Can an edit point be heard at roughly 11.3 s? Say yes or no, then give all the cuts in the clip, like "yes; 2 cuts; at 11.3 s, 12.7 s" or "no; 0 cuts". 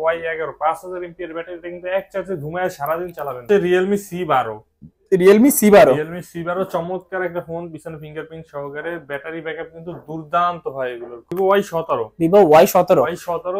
yes; 2 cuts; at 3.5 s, 11.3 s